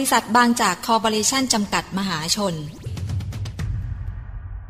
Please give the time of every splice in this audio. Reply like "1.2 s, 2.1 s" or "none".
2.9 s